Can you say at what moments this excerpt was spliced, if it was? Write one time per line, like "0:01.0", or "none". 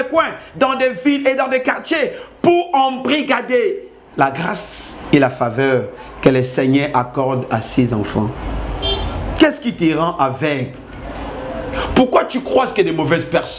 none